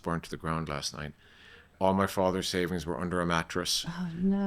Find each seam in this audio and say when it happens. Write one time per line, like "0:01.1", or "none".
0:01.7